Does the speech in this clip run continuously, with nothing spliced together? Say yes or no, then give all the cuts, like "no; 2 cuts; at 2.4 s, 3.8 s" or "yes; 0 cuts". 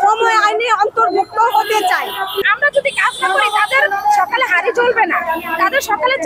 no; 1 cut; at 2.4 s